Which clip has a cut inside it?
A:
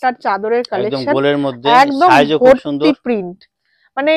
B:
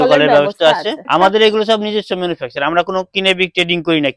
B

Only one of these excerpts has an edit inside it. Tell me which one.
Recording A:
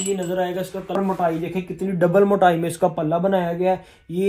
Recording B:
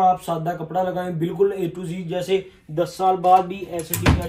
A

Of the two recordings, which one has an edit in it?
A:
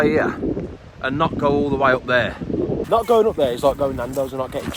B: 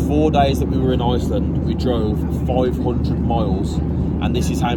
A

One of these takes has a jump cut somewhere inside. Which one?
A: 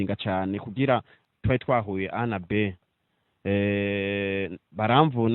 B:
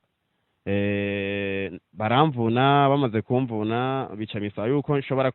A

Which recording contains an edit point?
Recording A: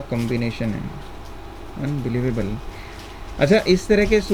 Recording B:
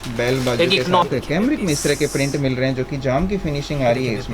B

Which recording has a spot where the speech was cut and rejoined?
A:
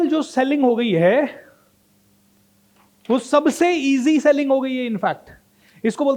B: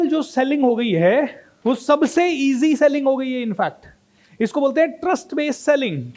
B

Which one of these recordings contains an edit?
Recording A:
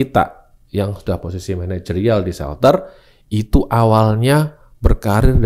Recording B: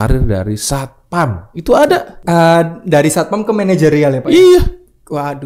B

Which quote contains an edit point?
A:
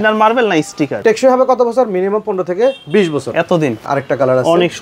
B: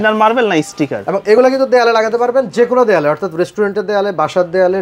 A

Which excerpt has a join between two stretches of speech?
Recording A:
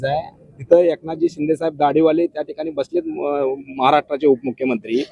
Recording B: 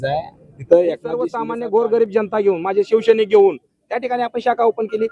B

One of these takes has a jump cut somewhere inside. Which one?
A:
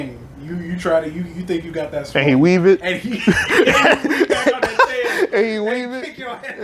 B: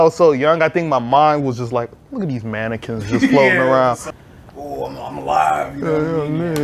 B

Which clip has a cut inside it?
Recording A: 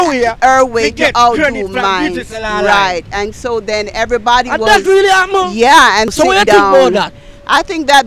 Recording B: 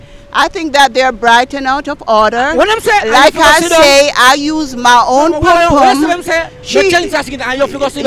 A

